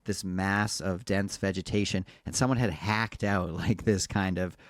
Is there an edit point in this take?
no; 0 cuts

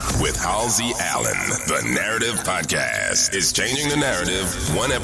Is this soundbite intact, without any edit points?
yes; 0 cuts

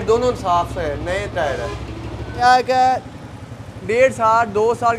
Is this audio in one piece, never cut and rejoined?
no; 1 cut; at 2.4 s

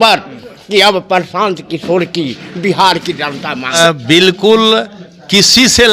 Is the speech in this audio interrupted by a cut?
yes; 1 cut; at 3.8 s

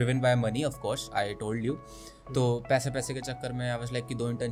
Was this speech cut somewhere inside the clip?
no; 0 cuts

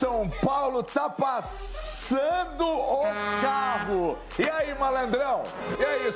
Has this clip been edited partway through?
no; 0 cuts

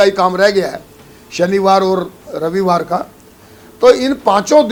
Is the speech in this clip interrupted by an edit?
no; 0 cuts

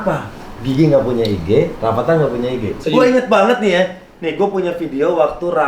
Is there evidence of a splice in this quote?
yes; 1 cut; at 2.8 s

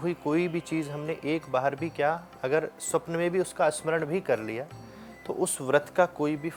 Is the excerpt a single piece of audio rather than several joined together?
yes; 0 cuts

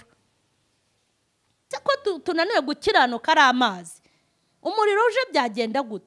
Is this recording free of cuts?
no; 1 cut; at 1.5 s

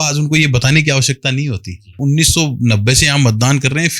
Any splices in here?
yes; 1 cut; at 2.0 s

